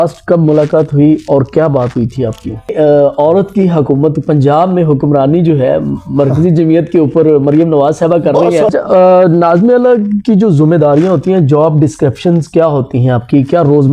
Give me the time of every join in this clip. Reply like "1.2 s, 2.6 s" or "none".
2.7 s, 8.7 s